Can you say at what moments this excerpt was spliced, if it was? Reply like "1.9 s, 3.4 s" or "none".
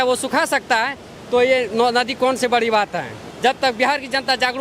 3.2 s